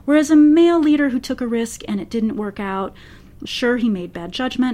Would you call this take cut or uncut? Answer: cut